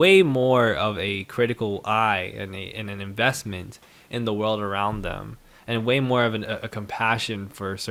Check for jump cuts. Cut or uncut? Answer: uncut